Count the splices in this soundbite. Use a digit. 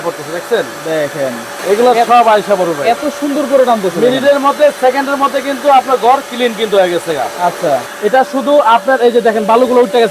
2